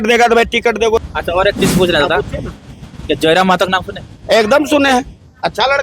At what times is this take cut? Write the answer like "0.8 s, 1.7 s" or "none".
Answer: 1.0 s